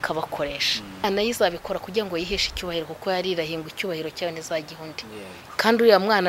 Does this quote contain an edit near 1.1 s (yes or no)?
yes